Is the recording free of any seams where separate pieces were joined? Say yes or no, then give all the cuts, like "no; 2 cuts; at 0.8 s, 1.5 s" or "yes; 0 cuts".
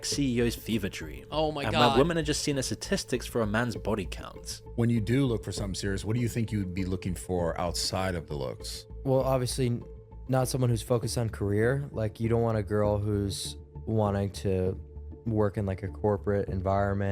yes; 0 cuts